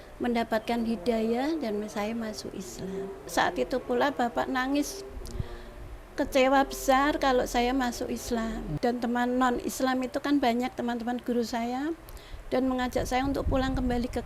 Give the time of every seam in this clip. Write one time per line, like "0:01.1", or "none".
0:03.2
0:08.7